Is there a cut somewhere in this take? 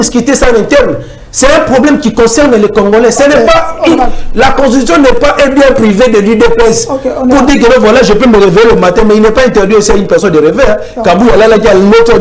no; 0 cuts

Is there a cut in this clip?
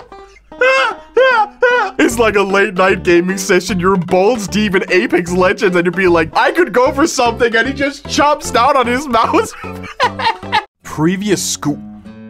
yes; 1 cut; at 10.6 s

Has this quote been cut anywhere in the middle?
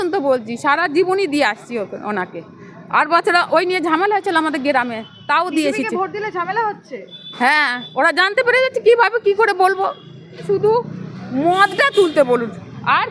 yes; 1 cut; at 10.4 s

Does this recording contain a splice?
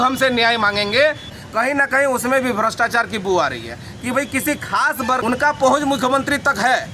yes; 2 cuts; at 1.3 s, 5.2 s

